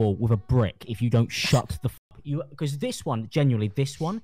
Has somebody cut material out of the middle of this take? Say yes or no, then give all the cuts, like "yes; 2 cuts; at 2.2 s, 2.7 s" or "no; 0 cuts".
yes; 1 cut; at 2.1 s